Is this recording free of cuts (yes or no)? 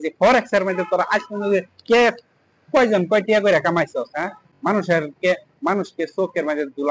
yes